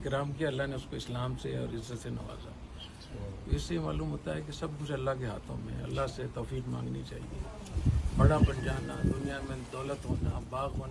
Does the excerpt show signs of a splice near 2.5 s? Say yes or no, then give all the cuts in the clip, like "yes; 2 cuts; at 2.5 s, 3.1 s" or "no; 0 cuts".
no; 0 cuts